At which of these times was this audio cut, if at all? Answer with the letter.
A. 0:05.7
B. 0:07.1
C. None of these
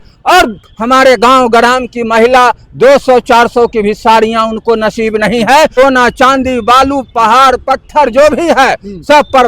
A